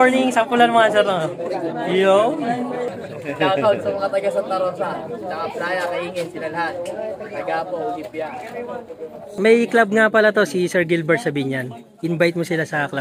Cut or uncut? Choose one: cut